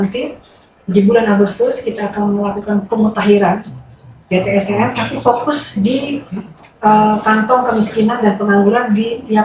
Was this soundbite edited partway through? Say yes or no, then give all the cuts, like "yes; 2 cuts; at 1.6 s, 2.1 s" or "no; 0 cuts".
no; 0 cuts